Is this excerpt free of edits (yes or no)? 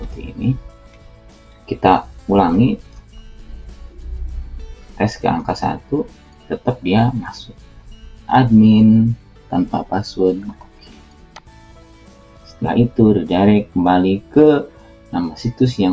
no